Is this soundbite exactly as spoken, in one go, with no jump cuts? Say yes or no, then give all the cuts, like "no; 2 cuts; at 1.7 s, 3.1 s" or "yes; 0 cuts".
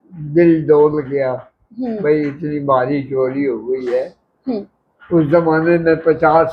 yes; 0 cuts